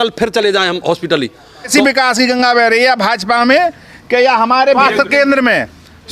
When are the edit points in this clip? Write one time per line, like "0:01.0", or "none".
0:01.7
0:04.8